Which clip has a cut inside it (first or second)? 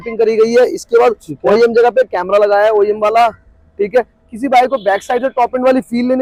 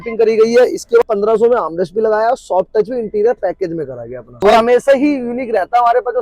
second